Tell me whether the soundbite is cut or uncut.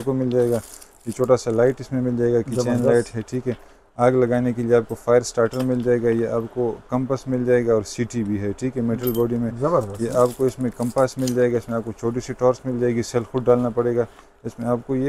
uncut